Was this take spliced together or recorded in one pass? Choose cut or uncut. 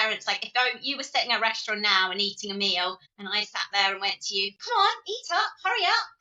cut